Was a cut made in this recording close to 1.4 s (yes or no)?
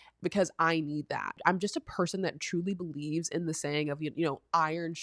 yes